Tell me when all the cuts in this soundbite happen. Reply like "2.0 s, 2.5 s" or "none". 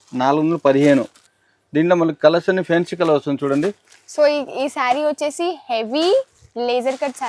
1.2 s

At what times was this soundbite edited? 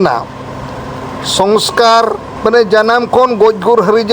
2.3 s

